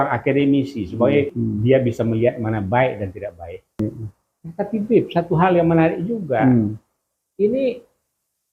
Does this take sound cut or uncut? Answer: cut